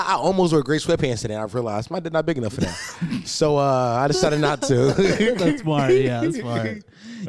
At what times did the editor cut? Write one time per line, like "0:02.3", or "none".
none